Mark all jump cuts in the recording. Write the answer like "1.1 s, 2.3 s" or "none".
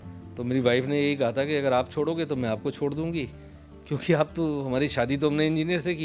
none